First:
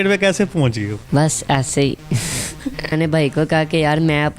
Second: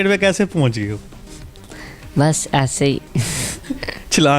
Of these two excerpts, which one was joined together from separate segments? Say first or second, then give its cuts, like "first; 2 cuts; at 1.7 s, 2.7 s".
first; 2 cuts; at 1.0 s, 2.9 s